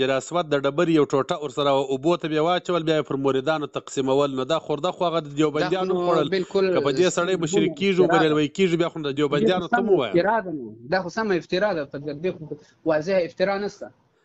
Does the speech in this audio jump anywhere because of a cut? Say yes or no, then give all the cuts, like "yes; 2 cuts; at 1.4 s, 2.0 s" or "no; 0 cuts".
no; 0 cuts